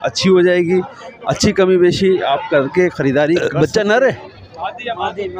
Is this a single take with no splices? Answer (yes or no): no